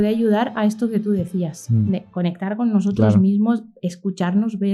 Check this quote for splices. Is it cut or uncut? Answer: uncut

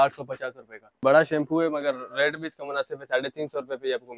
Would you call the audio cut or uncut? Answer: cut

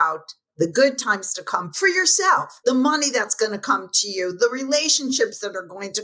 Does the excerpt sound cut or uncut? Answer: cut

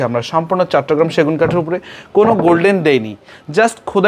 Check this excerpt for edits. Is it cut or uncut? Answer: uncut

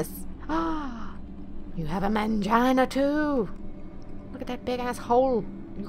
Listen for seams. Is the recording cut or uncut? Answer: uncut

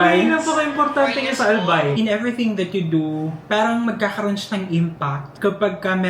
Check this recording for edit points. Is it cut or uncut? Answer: cut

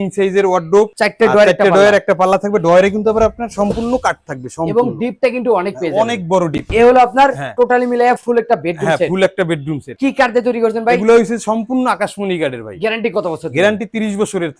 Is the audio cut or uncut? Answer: uncut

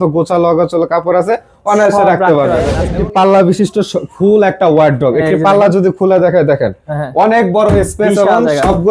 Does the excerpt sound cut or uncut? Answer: cut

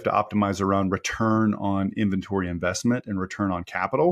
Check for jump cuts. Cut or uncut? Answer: uncut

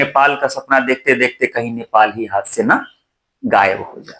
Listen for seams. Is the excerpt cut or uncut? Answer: uncut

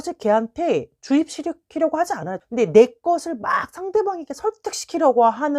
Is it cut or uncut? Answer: cut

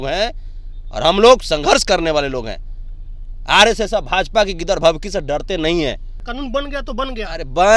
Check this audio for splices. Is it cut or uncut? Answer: cut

